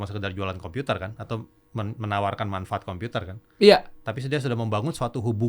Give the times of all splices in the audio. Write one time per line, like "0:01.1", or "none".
none